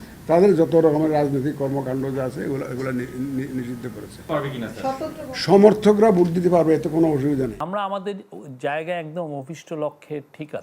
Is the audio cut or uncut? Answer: cut